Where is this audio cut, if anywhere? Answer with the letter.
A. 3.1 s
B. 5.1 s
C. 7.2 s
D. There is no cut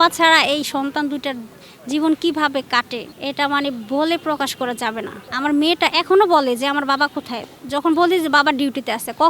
A